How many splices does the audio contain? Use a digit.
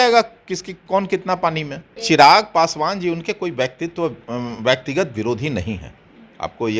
1